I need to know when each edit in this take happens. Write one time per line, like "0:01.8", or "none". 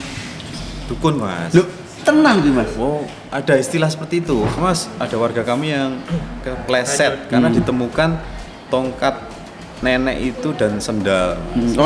0:04.6

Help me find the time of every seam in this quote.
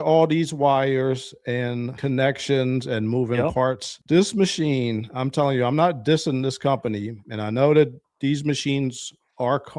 none

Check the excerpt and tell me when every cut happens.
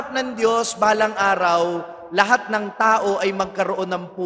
none

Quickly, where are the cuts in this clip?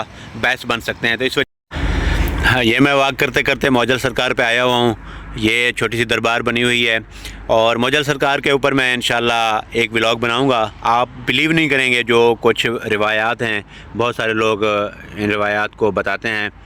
0:01.4

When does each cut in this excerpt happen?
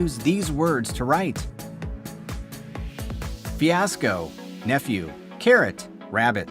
0:05.2

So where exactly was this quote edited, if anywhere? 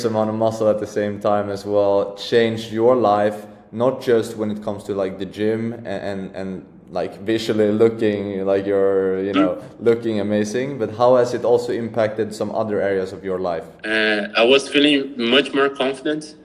0:13.7

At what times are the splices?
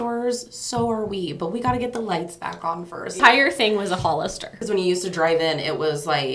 0:03.2
0:04.6

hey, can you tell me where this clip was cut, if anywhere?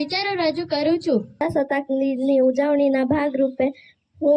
0:01.4

